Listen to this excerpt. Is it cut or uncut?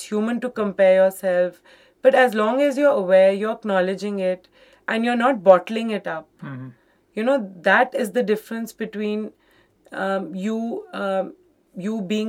uncut